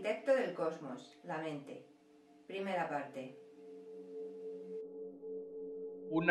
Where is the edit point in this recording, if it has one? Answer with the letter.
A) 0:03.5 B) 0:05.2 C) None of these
C